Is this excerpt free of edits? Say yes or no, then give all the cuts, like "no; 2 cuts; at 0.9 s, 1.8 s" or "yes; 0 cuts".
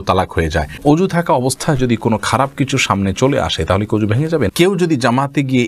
no; 2 cuts; at 1.0 s, 4.9 s